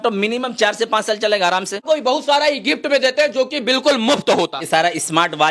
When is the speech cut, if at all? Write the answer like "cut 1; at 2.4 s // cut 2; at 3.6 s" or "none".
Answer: cut 1; at 1.8 s // cut 2; at 4.6 s